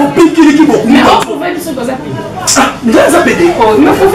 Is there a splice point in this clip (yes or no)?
no